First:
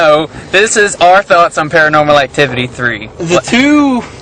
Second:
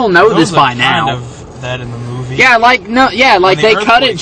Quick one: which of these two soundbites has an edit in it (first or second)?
second